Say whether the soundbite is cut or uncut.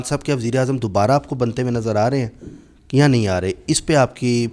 uncut